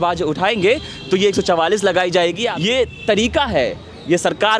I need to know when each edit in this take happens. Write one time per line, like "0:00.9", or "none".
0:02.5